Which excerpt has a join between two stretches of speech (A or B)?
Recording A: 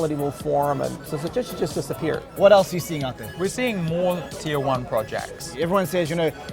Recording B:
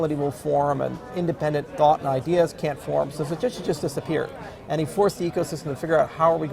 A